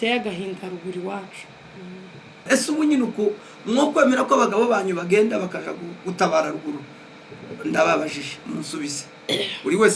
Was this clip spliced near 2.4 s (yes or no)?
yes